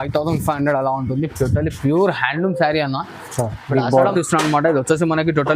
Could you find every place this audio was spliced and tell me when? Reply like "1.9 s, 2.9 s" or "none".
4.1 s

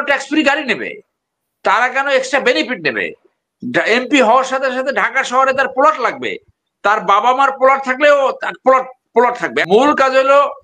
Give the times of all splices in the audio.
9.6 s

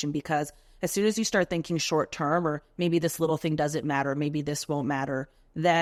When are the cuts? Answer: none

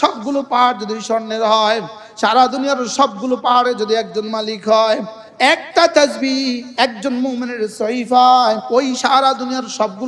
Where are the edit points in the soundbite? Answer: 5.2 s, 8.6 s

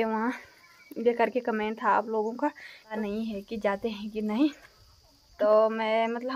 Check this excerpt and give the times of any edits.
2.9 s, 5.2 s

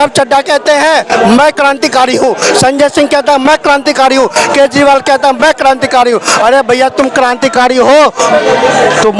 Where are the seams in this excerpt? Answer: none

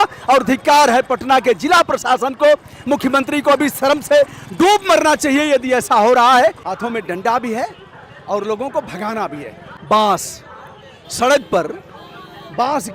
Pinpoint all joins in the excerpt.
6.7 s, 9.6 s

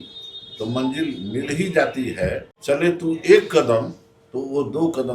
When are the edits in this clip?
2.5 s

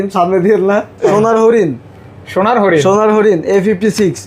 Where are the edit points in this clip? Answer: 1.1 s

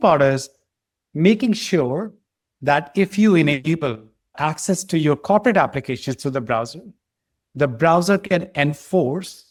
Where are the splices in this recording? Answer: none

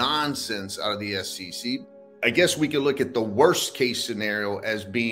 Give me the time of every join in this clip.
1.8 s

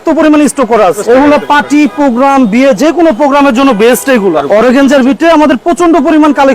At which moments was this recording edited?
1.0 s, 4.4 s

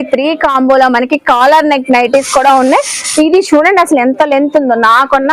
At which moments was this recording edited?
none

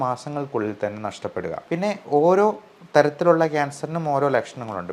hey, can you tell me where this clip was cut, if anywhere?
1.6 s

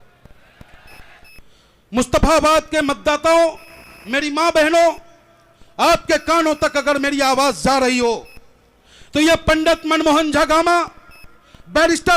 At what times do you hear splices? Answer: 1.2 s

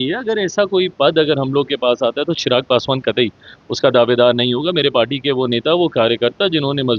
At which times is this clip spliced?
none

